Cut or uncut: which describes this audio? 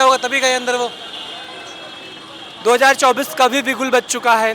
uncut